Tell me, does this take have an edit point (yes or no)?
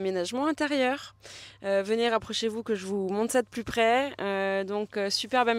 no